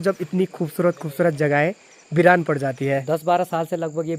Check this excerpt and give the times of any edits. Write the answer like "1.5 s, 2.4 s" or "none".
3.0 s